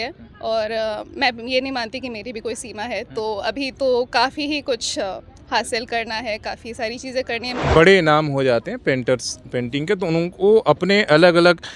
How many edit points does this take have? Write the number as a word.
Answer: one